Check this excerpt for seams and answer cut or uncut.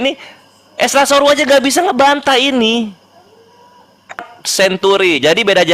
cut